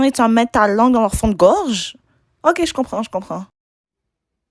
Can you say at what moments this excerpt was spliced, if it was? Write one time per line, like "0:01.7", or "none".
none